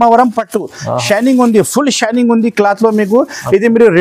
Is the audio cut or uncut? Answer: uncut